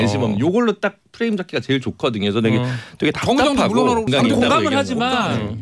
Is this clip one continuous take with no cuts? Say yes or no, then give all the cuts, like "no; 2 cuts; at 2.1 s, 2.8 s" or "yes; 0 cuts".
no; 1 cut; at 4.1 s